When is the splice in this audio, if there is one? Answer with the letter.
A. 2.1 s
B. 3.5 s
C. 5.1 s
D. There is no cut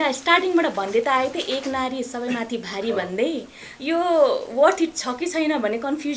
D